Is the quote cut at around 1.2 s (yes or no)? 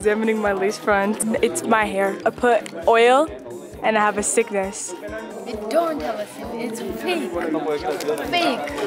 yes